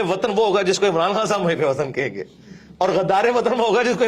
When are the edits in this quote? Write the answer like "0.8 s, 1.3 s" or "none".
none